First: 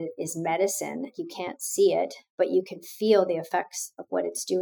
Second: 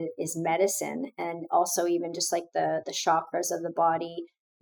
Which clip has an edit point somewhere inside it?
first; 1 cut; at 1.1 s

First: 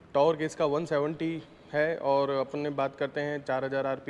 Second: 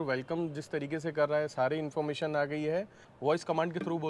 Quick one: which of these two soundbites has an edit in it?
second; 1 cut; at 3.0 s

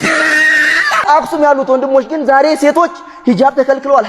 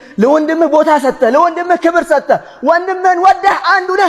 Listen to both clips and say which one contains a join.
first; 1 cut; at 1.0 s

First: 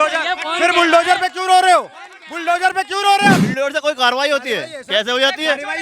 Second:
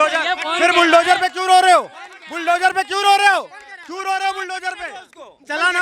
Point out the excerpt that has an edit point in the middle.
first; 1 cut; at 3.4 s

